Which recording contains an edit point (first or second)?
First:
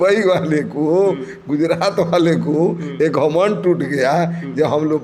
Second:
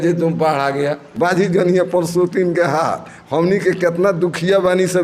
second